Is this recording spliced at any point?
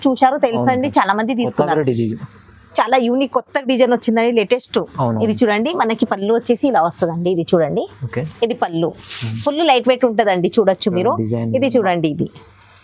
no; 0 cuts

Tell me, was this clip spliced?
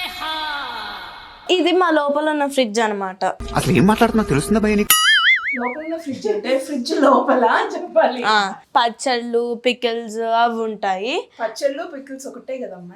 yes; 3 cuts; at 1.5 s, 3.4 s, 8.6 s

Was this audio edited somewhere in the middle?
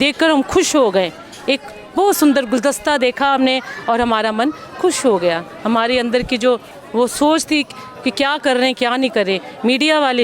no; 0 cuts

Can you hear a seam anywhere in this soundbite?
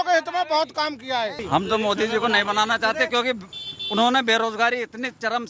yes; 1 cut; at 1.4 s

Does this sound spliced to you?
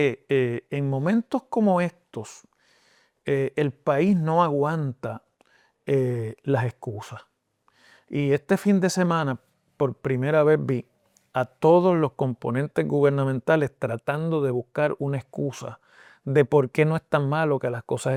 no; 0 cuts

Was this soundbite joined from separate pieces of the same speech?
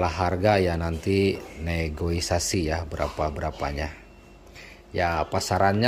no; 0 cuts

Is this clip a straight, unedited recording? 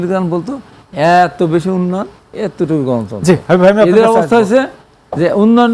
yes; 0 cuts

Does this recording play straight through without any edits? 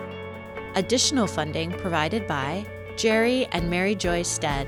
yes; 0 cuts

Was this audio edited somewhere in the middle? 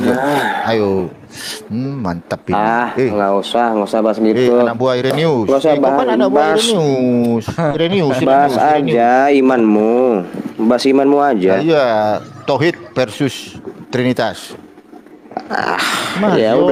no; 0 cuts

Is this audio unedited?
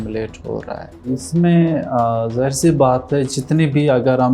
yes; 0 cuts

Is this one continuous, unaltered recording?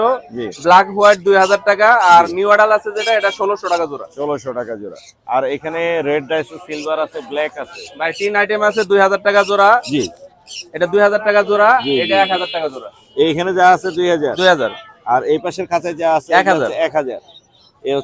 yes; 0 cuts

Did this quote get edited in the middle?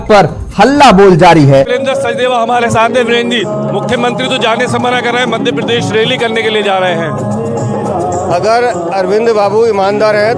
yes; 1 cut; at 1.7 s

